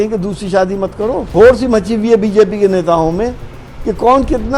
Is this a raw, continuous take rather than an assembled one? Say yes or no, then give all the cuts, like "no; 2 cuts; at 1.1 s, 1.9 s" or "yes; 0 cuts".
no; 1 cut; at 1.3 s